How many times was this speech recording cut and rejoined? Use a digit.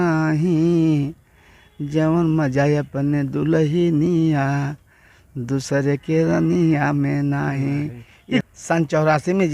1